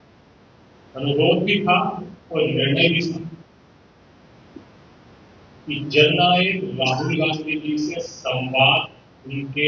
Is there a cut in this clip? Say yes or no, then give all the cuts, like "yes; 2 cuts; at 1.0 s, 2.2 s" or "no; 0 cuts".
no; 0 cuts